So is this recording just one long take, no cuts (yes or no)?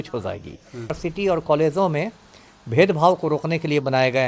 no